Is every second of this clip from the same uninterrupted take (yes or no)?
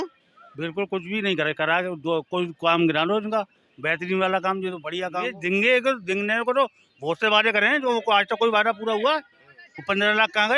no